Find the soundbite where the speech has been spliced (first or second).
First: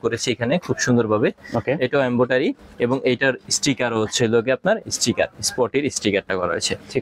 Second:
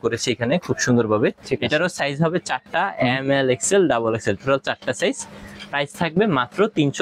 second